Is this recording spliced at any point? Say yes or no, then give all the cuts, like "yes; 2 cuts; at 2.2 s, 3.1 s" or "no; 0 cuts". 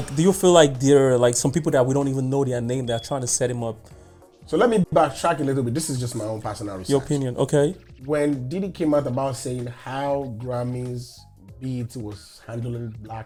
no; 0 cuts